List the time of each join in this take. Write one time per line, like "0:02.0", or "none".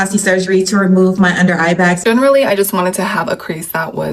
0:02.0